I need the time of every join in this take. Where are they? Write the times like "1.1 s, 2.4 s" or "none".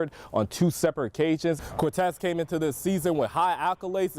1.6 s